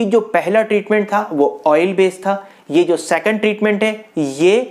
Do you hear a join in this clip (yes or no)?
no